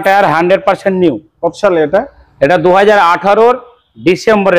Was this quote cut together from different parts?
no; 0 cuts

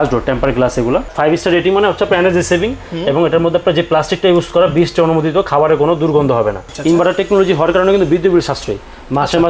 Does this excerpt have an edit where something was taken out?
yes; 2 cuts; at 1.1 s, 6.7 s

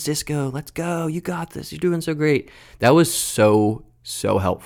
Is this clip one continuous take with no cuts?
yes; 0 cuts

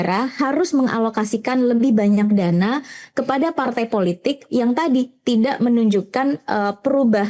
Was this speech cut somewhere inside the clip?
no; 0 cuts

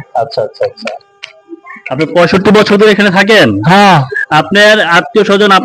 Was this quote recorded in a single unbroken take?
yes; 0 cuts

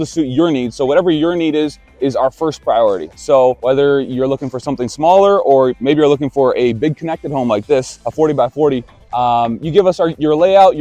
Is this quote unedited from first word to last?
yes; 0 cuts

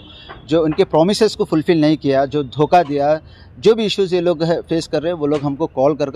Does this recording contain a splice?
no; 0 cuts

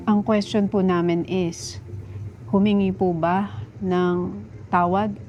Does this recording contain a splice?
no; 0 cuts

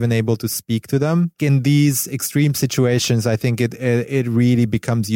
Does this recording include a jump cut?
yes; 1 cut; at 1.4 s

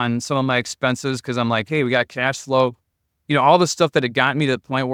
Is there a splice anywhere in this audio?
no; 0 cuts

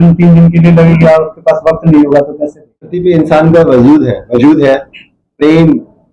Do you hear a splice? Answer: yes; 1 cut; at 3.0 s

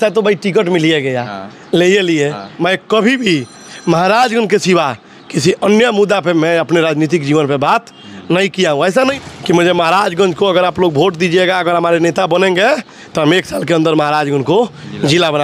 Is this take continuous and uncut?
no; 2 cuts; at 2.5 s, 9.1 s

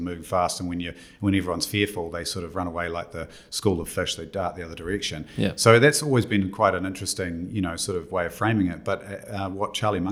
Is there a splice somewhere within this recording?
no; 0 cuts

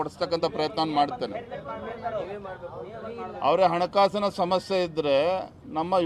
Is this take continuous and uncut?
yes; 0 cuts

